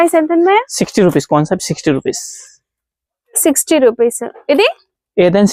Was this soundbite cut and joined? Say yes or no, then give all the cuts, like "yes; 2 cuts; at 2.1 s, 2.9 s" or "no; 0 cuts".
no; 0 cuts